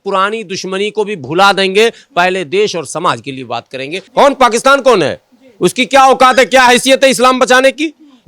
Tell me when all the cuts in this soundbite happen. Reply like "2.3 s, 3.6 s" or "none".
4.0 s